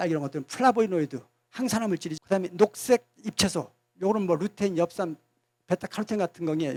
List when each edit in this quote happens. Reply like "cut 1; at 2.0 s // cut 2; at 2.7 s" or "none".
none